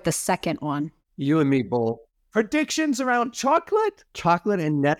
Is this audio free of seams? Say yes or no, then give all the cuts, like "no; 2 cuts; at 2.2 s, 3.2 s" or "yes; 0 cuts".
no; 1 cut; at 4.1 s